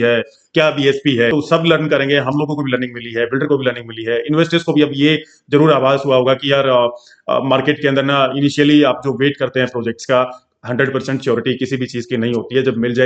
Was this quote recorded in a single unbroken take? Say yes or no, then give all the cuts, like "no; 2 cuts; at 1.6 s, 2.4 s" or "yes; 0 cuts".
no; 1 cut; at 1.3 s